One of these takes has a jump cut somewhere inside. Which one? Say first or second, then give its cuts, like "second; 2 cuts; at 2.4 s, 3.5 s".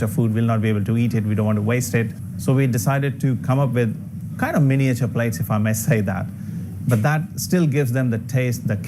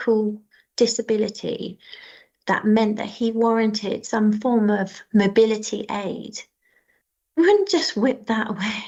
first; 1 cut; at 2.2 s